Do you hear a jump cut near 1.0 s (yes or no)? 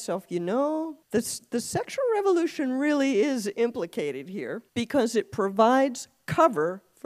yes